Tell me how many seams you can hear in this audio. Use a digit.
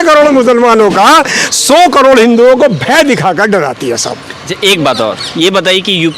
0